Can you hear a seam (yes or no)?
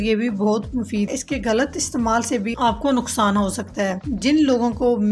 yes